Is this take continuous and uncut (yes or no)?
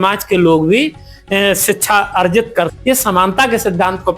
no